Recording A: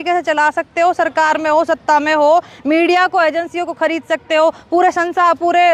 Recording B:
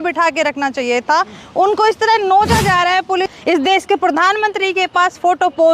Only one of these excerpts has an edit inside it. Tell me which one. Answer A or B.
B